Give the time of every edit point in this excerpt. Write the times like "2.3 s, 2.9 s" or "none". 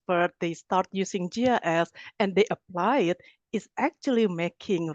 none